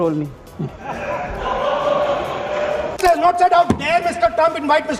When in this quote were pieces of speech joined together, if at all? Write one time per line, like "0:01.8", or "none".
0:02.9